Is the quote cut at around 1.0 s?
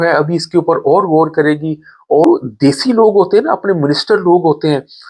no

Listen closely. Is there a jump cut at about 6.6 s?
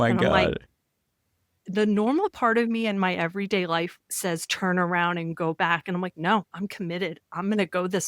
yes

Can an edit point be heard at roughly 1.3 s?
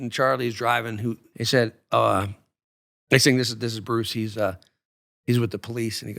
yes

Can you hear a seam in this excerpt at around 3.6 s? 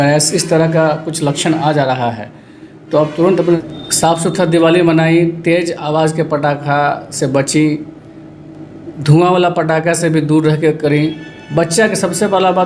yes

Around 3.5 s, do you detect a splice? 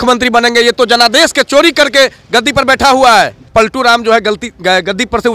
yes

